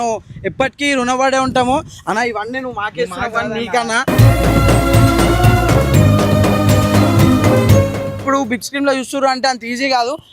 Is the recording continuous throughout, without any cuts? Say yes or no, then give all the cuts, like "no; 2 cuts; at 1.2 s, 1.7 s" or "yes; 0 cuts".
no; 1 cut; at 8.2 s